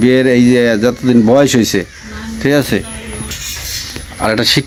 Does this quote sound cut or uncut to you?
uncut